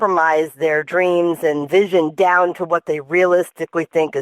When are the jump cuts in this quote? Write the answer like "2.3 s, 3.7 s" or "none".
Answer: none